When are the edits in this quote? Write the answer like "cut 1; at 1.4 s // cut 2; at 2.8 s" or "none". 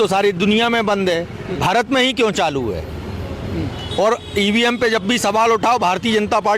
cut 1; at 1.4 s